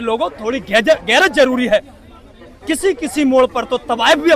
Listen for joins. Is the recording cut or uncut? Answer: uncut